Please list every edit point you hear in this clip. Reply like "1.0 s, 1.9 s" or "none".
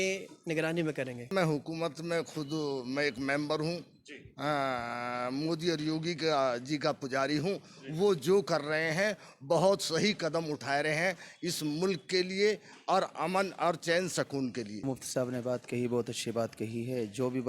1.3 s, 14.8 s